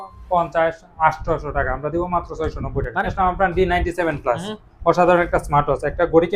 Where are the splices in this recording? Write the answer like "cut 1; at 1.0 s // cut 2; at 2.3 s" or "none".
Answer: cut 1; at 2.9 s